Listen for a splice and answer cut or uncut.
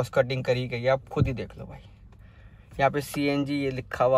uncut